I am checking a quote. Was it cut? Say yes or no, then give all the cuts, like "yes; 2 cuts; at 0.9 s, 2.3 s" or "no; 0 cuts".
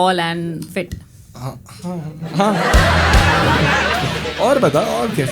yes; 1 cut; at 4.2 s